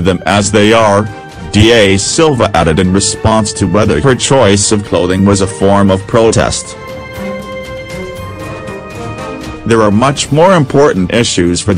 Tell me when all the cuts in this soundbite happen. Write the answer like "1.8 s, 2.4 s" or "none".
none